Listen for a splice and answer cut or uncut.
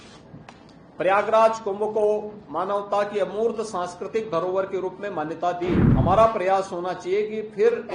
cut